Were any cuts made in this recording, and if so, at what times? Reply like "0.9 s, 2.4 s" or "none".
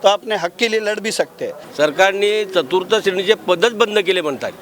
1.6 s